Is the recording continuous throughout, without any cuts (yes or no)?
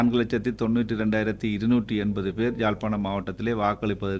yes